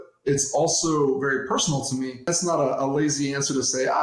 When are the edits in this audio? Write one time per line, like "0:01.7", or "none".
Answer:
0:02.3